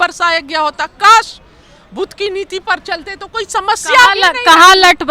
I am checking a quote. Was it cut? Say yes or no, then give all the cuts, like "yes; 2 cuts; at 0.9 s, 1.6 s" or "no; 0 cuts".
no; 0 cuts